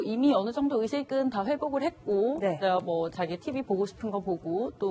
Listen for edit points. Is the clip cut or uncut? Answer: uncut